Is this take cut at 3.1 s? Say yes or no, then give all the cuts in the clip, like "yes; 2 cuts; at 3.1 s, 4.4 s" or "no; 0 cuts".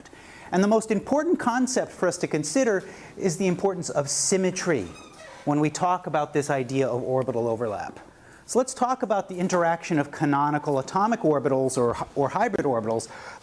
no; 1 cut; at 10.1 s